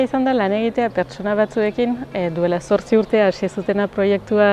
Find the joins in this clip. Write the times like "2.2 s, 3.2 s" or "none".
none